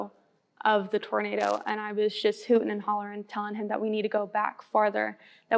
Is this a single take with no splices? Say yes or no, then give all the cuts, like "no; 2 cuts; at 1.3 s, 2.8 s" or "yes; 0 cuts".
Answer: yes; 0 cuts